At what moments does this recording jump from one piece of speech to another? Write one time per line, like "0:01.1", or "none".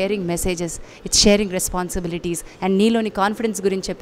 none